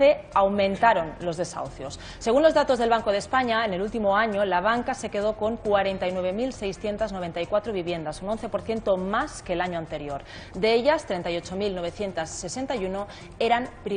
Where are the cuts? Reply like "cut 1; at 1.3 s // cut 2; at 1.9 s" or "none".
cut 1; at 8.8 s

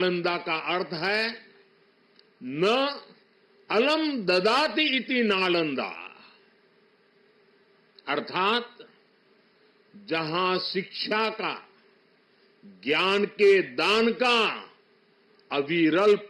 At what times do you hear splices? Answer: none

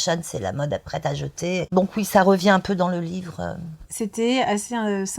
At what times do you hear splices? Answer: cut 1; at 1.7 s // cut 2; at 3.8 s

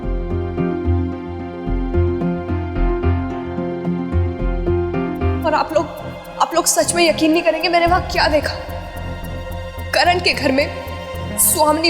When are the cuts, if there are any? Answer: cut 1; at 5.4 s

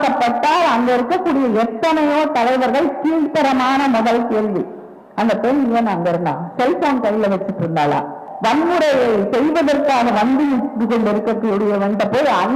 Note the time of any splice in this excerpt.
cut 1; at 8.3 s

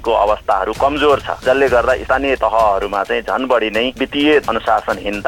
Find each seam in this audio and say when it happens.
cut 1; at 2.2 s // cut 2; at 4.0 s

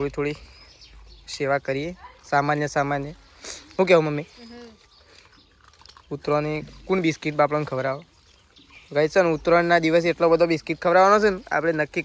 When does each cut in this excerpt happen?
none

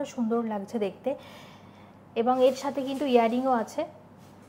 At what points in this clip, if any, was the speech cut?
none

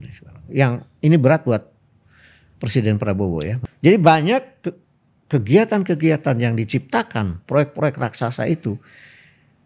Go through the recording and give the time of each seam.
cut 1; at 3.6 s

